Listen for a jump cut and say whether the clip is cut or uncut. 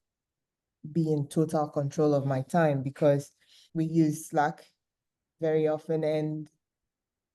cut